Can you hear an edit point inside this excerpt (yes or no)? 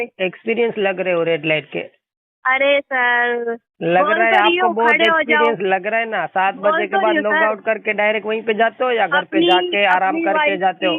no